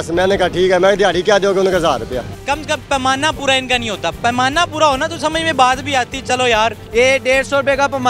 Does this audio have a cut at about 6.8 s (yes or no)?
yes